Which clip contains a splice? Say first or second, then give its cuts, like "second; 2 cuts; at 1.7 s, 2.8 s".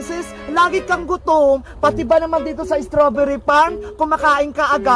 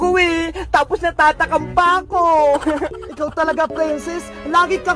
second; 1 cut; at 3.0 s